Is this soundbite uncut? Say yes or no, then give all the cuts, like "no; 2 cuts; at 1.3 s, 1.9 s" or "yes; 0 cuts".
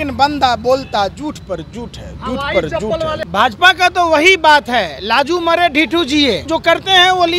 no; 2 cuts; at 3.2 s, 6.5 s